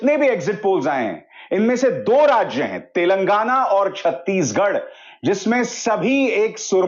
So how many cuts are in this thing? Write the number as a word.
zero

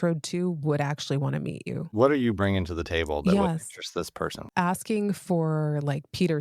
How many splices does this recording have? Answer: two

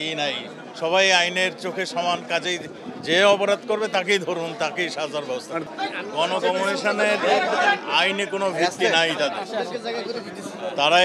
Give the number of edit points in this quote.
one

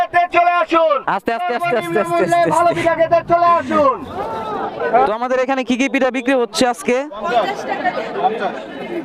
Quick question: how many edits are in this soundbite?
zero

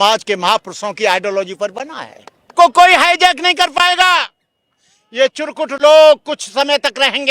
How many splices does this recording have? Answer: zero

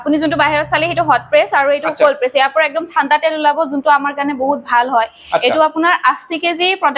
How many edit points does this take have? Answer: zero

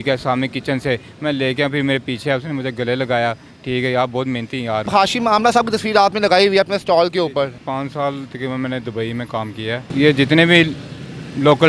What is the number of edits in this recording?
three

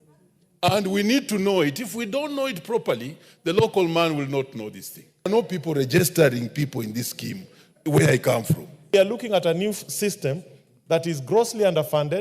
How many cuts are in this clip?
two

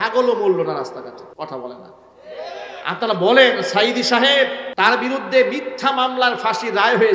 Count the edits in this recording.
two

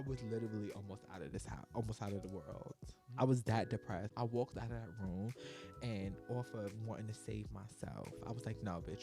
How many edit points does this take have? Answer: one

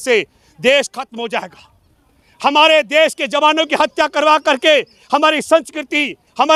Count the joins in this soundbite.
zero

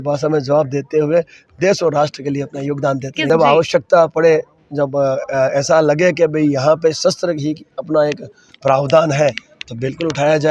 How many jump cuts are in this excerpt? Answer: one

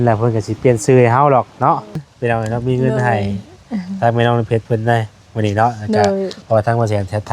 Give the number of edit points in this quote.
one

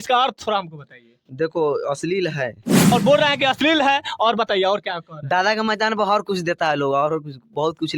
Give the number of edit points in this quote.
one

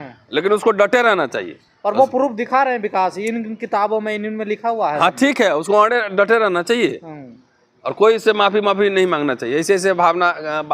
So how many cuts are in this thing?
zero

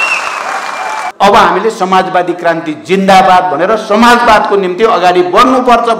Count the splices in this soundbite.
one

